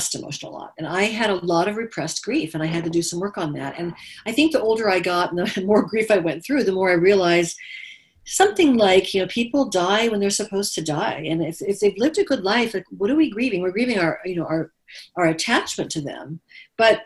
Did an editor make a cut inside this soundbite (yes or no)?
no